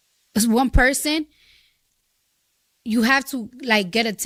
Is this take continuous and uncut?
yes; 0 cuts

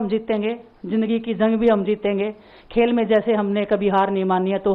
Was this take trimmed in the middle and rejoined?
no; 0 cuts

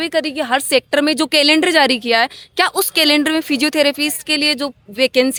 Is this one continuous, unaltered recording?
yes; 0 cuts

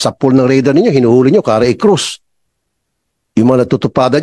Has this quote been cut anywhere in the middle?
no; 0 cuts

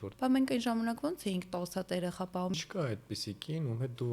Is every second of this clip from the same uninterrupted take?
no; 1 cut; at 2.5 s

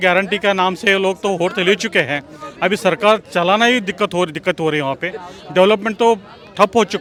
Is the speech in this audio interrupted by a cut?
no; 0 cuts

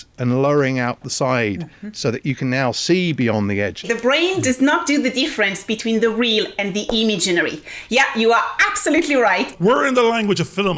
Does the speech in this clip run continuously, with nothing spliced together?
no; 2 cuts; at 3.9 s, 9.5 s

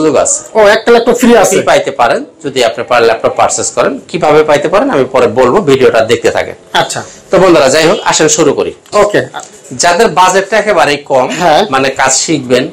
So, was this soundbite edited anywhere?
no; 0 cuts

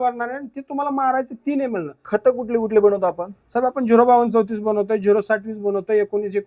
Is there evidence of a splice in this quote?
yes; 1 cut; at 2.0 s

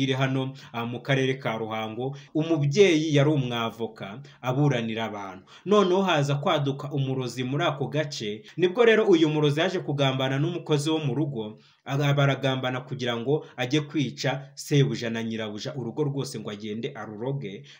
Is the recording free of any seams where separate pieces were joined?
no; 2 cuts; at 2.2 s, 8.5 s

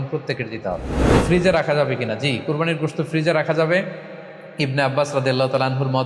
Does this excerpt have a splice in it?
yes; 1 cut; at 1.2 s

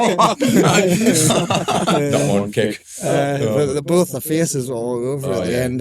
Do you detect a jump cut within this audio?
no; 0 cuts

